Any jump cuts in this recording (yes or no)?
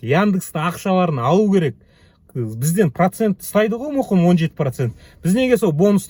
no